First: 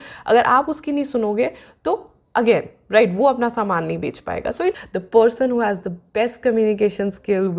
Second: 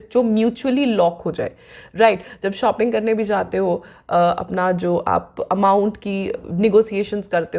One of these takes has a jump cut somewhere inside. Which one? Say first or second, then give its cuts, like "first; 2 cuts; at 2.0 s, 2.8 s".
first; 1 cut; at 4.7 s